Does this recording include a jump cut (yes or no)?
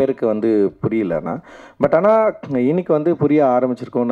no